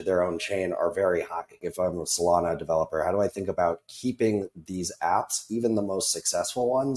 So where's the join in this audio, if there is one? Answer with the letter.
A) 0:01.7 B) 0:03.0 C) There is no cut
A